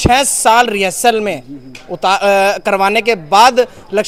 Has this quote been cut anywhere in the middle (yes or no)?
no